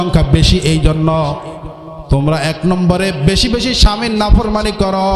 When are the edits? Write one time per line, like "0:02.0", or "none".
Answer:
none